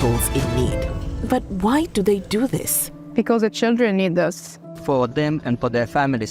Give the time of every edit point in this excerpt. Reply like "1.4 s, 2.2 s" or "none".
none

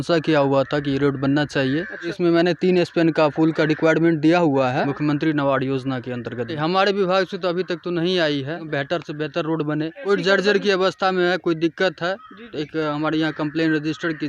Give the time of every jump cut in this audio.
2.2 s, 4.9 s, 6.6 s, 8.6 s, 10.0 s

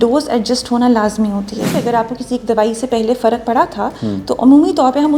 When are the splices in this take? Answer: 1.7 s

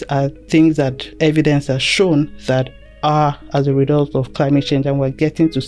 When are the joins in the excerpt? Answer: none

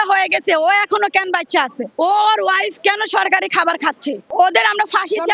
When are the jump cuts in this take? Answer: 1.8 s, 4.3 s

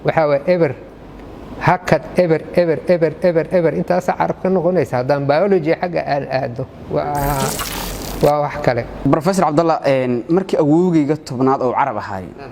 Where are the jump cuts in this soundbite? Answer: 6.7 s

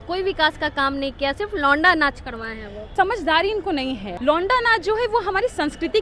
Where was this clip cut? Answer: 2.8 s, 4.1 s

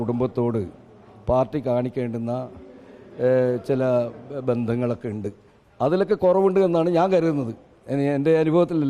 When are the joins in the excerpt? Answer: none

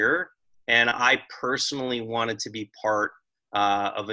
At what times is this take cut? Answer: none

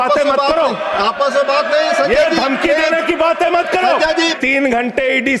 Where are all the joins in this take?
4.4 s

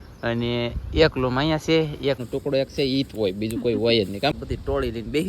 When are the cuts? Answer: 2.2 s, 4.4 s

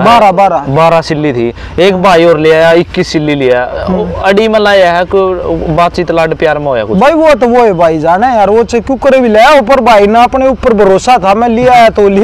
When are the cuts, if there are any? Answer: none

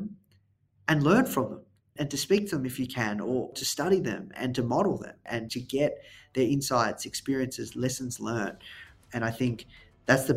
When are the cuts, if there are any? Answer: 1.9 s, 3.5 s, 4.3 s, 5.3 s, 8.9 s

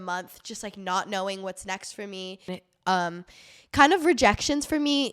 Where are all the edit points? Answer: 2.6 s

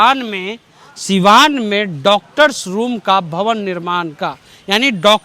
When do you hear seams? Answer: none

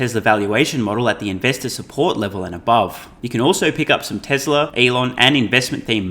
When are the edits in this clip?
3.1 s, 4.7 s

